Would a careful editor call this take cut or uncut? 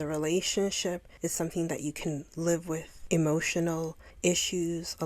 cut